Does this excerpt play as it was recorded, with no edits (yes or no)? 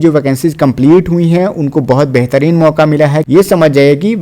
no